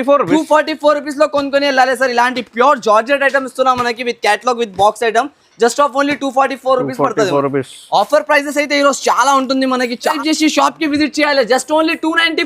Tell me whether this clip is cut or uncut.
cut